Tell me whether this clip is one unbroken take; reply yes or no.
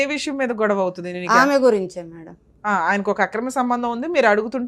yes